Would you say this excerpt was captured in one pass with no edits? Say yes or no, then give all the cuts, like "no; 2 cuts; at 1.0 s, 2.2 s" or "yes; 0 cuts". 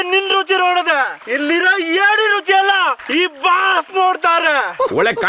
no; 2 cuts; at 1.2 s, 3.0 s